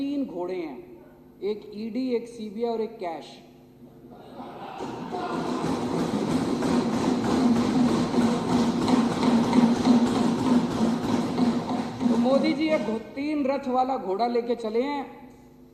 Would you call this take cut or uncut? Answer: uncut